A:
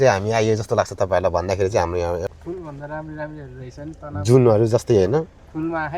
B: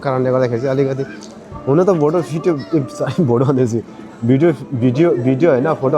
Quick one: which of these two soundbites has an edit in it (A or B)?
A